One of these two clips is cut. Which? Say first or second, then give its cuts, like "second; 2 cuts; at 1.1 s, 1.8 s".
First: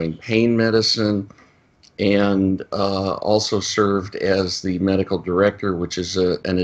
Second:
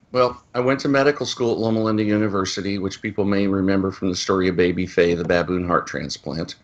first; 1 cut; at 4.3 s